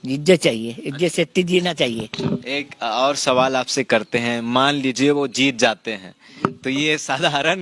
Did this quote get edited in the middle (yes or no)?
no